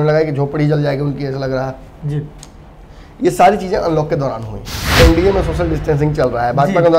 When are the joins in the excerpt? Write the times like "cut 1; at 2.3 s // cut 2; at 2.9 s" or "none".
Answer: cut 1; at 4.9 s